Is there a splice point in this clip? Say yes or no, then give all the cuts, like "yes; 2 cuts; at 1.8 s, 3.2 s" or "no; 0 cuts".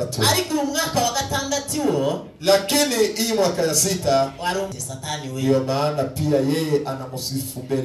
yes; 1 cut; at 4.8 s